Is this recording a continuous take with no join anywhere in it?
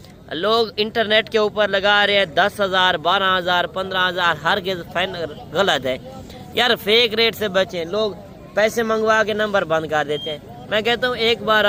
yes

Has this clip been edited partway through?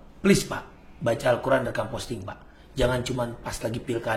no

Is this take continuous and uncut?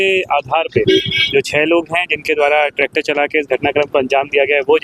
yes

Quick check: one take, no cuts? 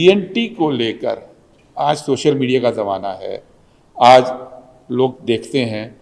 yes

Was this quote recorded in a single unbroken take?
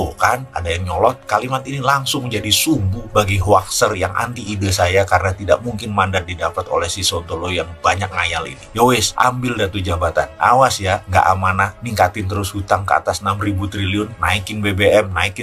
yes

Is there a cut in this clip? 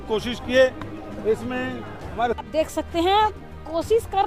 yes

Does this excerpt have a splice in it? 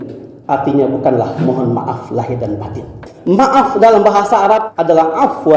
yes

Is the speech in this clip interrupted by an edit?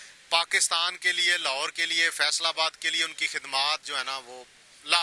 no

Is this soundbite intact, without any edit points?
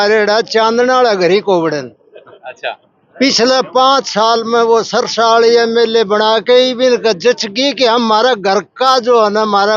yes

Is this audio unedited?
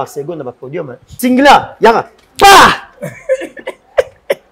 no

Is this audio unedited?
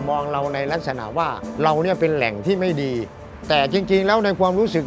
no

